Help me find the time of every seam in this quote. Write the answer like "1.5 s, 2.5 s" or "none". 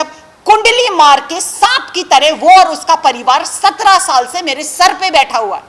none